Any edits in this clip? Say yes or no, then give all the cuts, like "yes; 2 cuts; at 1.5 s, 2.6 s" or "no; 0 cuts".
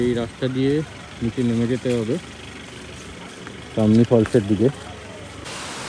no; 0 cuts